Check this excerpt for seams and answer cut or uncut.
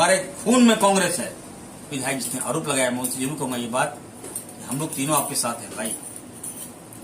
cut